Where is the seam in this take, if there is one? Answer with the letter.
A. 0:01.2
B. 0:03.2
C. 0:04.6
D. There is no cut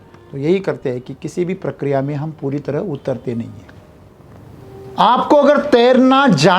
C